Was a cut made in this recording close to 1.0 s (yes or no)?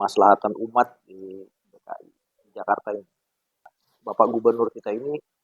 no